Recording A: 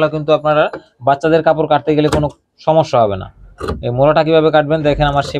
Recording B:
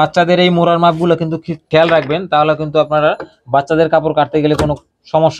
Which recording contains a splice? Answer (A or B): B